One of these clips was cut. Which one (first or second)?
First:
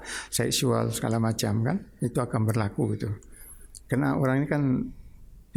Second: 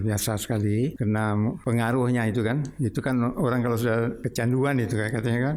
second